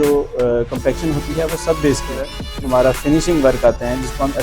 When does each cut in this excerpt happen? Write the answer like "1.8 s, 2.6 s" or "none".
2.4 s